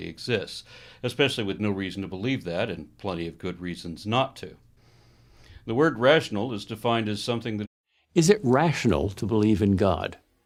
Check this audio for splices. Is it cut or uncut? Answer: uncut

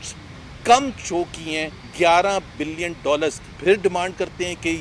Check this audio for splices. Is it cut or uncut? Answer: cut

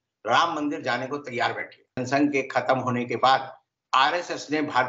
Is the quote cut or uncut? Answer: cut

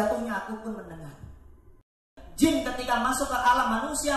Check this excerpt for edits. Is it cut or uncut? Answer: cut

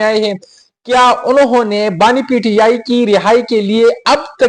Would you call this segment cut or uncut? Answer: uncut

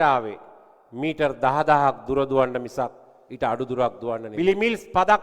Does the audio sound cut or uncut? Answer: cut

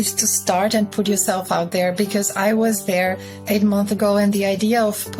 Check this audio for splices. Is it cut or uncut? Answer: uncut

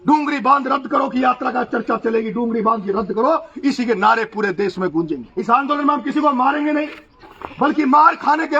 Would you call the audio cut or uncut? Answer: cut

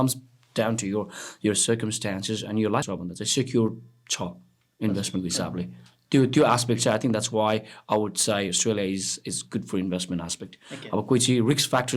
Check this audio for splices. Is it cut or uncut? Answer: cut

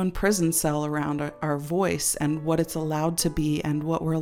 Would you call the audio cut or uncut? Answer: uncut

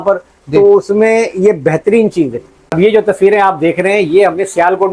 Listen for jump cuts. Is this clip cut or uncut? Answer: cut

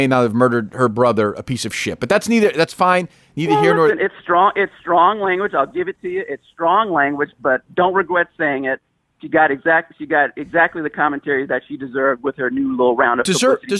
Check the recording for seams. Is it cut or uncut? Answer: uncut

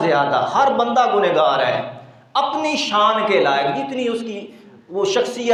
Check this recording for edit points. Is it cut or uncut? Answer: uncut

